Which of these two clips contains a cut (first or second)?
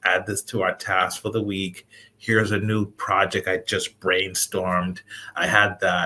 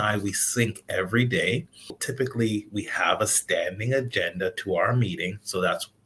second